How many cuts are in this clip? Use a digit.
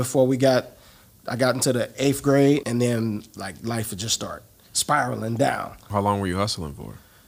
2